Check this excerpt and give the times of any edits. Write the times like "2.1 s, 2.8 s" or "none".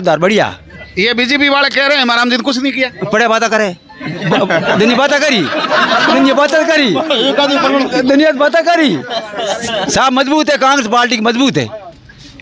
none